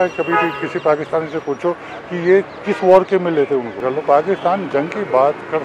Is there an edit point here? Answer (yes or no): yes